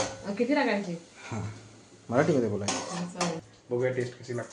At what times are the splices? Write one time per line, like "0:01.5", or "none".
0:03.5

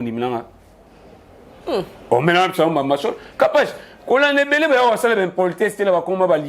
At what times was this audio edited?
none

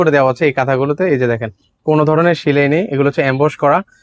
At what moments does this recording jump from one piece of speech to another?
none

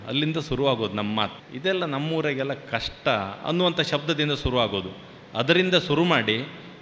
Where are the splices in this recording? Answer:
0:01.4

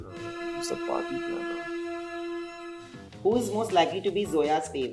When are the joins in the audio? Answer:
0:03.0

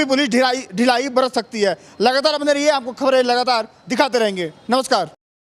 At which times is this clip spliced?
none

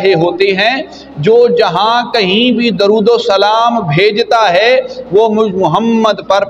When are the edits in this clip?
none

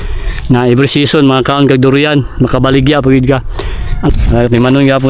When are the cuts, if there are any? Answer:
0:04.1

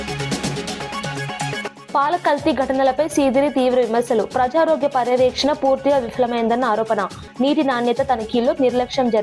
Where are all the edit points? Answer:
0:00.9
0:01.8

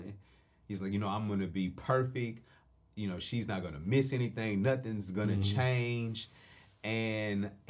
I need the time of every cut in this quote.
none

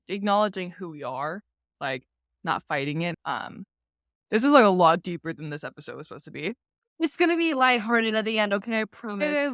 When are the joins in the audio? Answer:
0:03.1

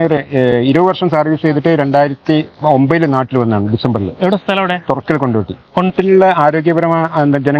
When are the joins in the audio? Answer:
none

